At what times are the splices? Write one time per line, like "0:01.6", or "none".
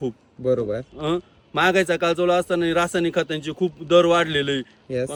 none